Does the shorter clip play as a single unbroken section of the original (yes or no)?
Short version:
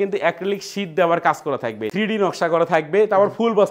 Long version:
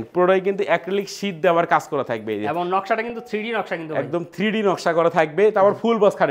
no